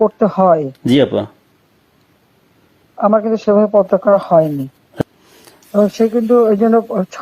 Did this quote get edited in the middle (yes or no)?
yes